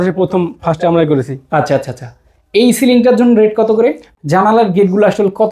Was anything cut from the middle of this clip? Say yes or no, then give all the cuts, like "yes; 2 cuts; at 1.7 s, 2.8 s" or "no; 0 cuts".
yes; 1 cut; at 4.1 s